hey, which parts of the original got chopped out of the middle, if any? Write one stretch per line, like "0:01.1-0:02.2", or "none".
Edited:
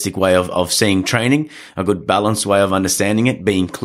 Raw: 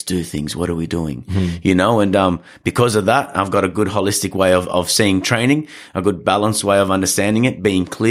none